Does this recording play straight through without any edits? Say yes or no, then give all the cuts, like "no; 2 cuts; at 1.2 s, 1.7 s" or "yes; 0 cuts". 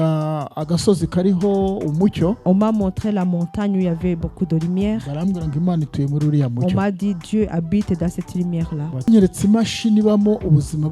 no; 1 cut; at 9.1 s